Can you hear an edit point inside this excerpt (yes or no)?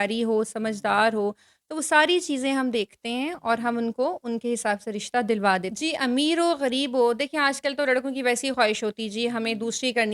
yes